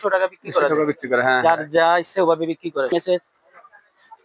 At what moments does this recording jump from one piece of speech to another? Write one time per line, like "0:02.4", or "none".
0:02.9

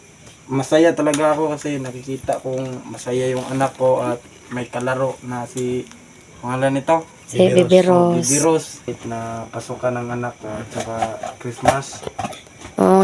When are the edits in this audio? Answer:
0:08.8

